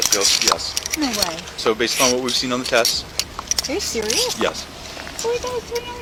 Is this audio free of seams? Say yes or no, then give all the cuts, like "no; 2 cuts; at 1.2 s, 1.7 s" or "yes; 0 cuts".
yes; 0 cuts